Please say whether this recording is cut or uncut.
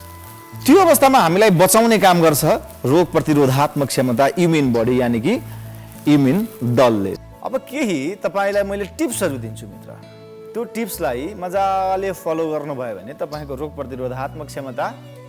cut